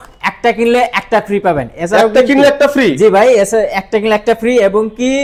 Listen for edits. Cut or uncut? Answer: uncut